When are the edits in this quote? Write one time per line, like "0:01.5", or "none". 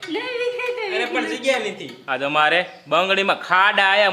0:01.9